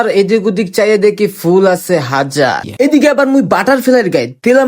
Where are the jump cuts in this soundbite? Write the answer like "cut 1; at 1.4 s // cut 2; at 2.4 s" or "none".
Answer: cut 1; at 2.7 s